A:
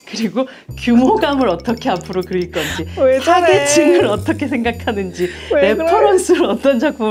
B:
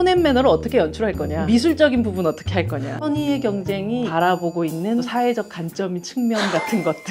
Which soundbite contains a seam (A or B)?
B